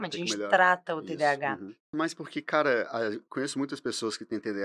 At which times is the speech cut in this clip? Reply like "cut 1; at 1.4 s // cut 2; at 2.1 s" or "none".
cut 1; at 1.9 s